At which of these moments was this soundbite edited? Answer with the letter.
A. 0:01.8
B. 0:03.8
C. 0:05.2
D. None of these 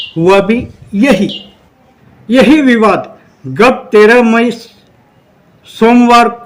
D